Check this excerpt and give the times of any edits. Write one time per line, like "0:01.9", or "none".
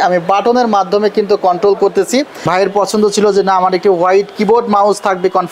0:02.4